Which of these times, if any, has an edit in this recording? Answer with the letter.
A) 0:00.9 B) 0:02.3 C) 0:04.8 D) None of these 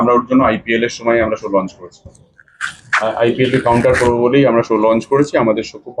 D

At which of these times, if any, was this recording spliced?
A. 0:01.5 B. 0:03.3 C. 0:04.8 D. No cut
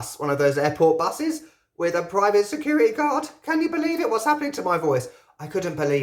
D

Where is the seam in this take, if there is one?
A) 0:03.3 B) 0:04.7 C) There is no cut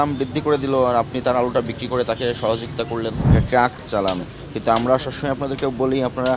A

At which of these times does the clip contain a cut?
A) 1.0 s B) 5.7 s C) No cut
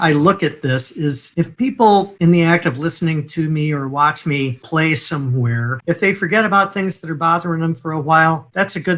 B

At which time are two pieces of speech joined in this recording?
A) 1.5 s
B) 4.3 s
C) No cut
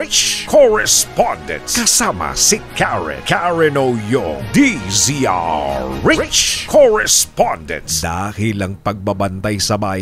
A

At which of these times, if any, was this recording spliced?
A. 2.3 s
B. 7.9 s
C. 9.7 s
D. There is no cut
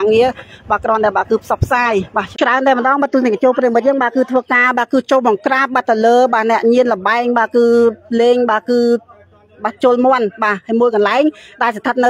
A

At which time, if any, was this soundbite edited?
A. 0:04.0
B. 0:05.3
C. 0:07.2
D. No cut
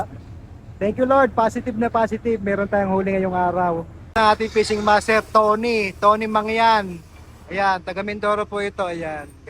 A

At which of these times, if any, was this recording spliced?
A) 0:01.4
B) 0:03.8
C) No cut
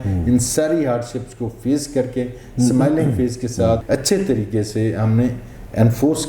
B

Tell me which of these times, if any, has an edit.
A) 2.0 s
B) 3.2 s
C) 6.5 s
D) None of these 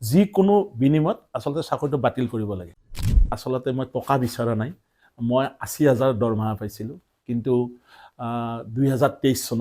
B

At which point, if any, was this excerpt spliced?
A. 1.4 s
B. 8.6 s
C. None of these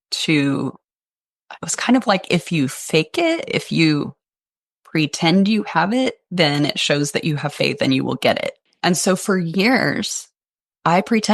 B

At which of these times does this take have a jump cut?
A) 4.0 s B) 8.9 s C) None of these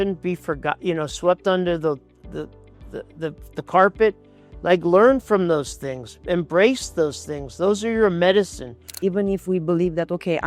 B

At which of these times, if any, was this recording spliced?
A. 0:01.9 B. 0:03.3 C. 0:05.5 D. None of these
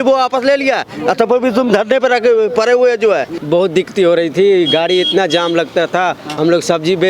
B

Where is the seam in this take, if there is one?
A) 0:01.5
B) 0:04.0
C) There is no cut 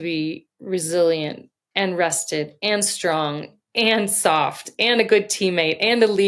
C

